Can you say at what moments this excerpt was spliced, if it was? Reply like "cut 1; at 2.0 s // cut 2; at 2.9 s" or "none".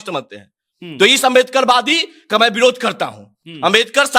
none